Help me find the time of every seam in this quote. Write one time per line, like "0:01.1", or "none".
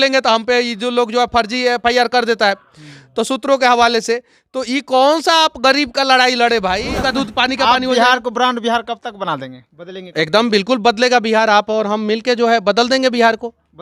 0:06.9